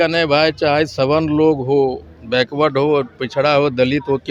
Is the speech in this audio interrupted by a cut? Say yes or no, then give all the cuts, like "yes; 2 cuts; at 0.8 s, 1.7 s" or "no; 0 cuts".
no; 0 cuts